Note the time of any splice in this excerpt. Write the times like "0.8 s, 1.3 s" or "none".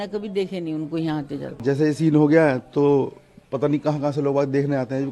1.6 s